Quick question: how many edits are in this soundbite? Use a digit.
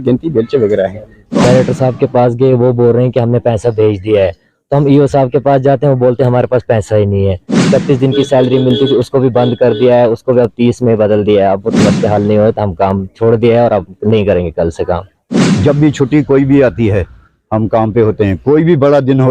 4